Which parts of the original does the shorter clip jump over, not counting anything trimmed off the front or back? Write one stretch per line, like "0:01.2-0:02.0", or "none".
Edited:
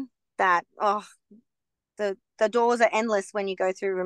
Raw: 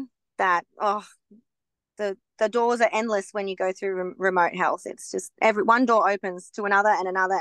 none

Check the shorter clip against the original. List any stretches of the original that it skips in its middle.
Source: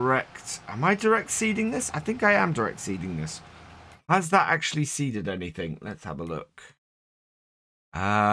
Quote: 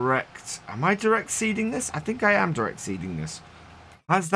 none

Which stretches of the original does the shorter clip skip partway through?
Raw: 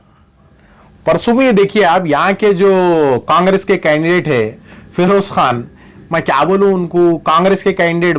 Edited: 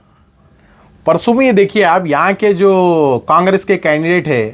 none

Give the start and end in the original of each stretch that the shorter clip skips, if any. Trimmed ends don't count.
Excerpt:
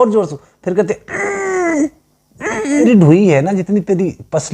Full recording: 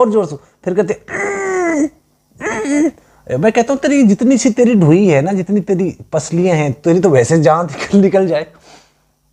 0:02.8-0:04.6

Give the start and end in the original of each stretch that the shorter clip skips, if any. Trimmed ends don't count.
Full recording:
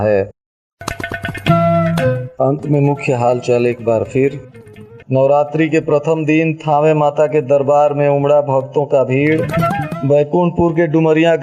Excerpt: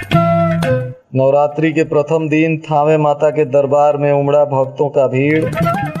0:02.3-0:04.9

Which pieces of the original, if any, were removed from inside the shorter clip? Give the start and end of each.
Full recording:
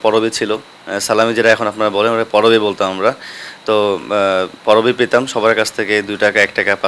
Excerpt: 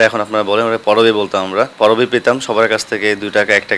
0:03.2-0:04.6

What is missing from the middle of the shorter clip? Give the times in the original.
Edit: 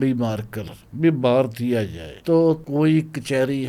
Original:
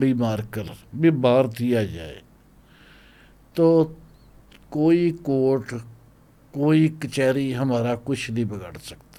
0:02.0-0:03.4
0:03.9-0:06.5

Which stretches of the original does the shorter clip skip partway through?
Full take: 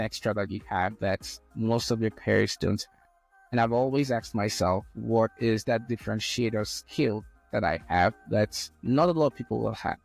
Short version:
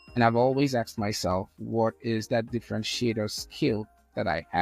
none

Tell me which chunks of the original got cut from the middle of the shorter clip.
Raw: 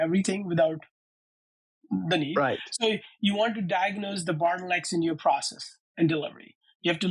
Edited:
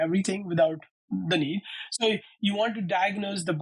0:00.9-0:01.7

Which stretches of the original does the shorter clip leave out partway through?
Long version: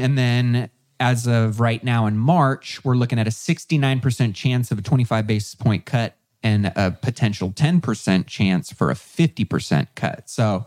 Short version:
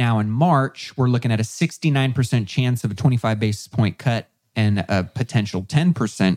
none

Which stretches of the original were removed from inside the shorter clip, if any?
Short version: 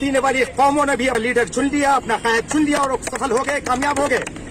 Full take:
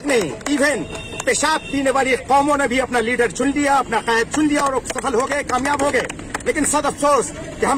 0:02.9-0:03.0

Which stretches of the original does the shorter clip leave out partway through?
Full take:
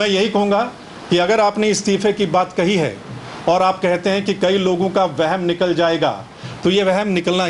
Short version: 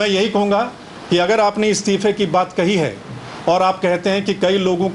none

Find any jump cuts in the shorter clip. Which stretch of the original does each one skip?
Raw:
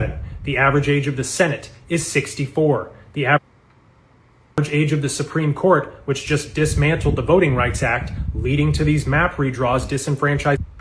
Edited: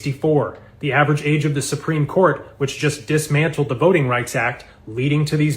0:03.4-0:04.5

